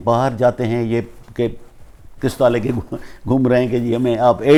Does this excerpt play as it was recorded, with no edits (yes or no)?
yes